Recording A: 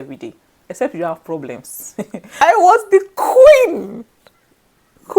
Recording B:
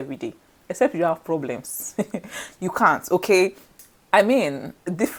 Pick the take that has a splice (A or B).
A